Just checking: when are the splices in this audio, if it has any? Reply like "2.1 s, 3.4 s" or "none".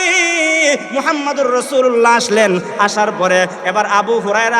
3.6 s